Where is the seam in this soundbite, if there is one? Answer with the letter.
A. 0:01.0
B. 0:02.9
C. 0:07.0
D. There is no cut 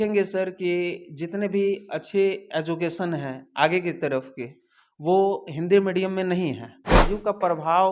C